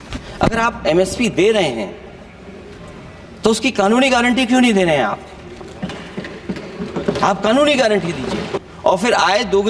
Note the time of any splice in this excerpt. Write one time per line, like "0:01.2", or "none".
0:08.6